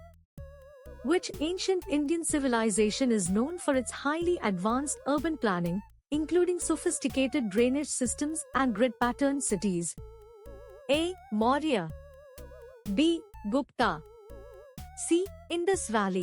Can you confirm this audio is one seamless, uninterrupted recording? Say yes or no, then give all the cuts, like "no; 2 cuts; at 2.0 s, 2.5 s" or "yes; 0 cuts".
no; 1 cut; at 1.0 s